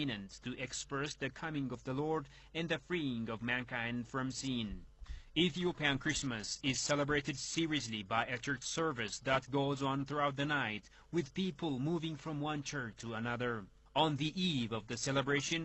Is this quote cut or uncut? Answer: uncut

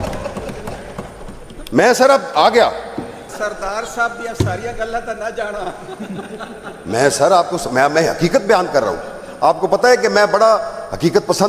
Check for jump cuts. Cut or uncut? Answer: cut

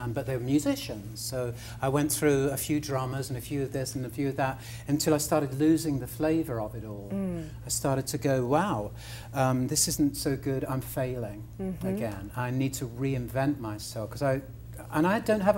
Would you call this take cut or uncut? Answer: uncut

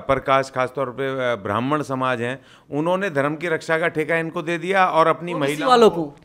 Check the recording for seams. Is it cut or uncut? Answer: uncut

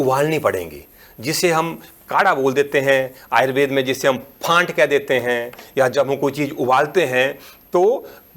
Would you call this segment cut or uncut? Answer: uncut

